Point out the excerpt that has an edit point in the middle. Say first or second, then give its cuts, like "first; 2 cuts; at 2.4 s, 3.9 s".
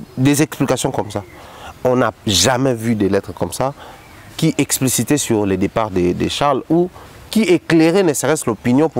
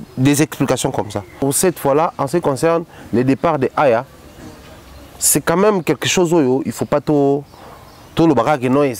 second; 1 cut; at 1.3 s